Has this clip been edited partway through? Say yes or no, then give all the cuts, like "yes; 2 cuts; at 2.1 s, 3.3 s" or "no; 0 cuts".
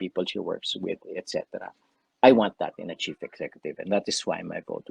no; 0 cuts